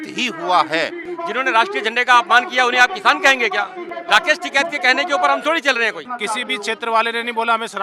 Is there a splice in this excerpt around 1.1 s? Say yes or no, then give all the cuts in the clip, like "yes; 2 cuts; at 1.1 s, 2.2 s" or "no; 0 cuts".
yes; 3 cuts; at 1.1 s, 3.9 s, 6.1 s